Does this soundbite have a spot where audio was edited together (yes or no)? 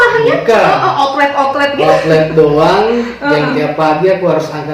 no